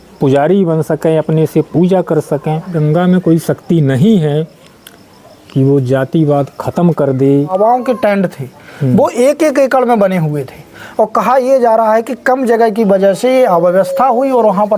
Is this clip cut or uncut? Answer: cut